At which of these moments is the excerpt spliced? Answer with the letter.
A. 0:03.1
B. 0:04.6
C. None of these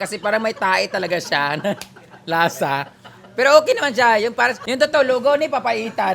B